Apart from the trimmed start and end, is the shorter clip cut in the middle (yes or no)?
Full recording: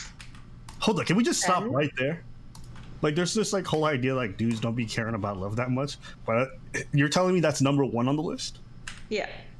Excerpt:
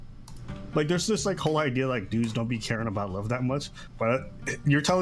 no